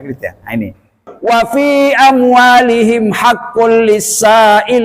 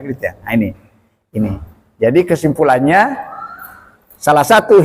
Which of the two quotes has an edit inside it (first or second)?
first